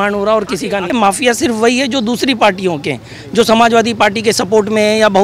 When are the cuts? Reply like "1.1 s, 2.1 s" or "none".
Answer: 0.9 s